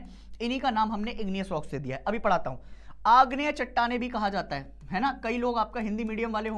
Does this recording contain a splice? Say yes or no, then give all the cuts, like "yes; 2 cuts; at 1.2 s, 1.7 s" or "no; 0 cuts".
no; 0 cuts